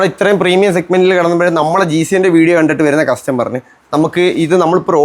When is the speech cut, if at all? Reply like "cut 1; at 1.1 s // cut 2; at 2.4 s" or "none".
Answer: none